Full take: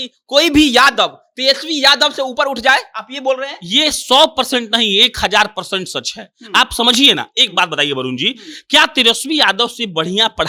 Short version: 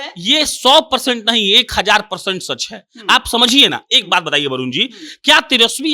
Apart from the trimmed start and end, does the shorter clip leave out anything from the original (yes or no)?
no